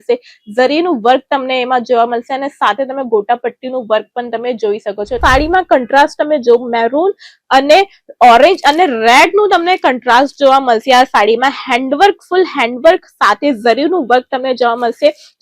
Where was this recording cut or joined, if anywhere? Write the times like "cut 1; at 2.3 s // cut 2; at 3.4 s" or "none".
cut 1; at 5.2 s